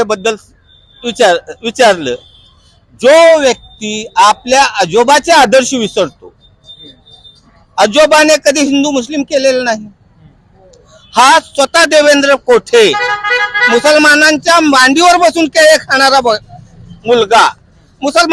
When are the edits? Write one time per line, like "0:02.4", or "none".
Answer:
none